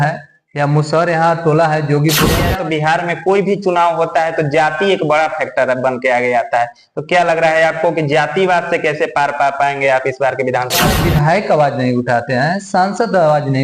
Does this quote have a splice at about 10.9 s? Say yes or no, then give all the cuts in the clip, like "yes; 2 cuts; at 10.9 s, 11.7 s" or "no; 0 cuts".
yes; 2 cuts; at 2.5 s, 10.9 s